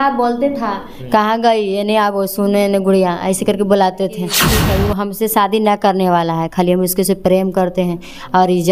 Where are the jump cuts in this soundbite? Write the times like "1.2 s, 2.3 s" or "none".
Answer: 4.5 s